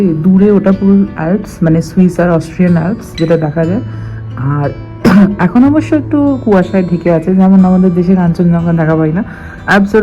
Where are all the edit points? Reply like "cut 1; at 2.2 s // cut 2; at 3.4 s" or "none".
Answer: none